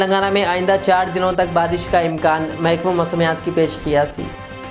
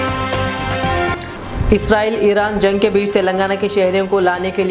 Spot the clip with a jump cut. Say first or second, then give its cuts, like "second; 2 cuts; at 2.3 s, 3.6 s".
second; 1 cut; at 1.2 s